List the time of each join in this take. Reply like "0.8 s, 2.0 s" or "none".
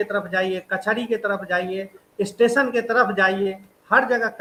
none